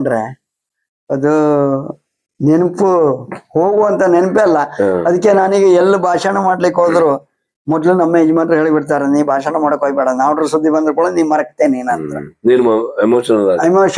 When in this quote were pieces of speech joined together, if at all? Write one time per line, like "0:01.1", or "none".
none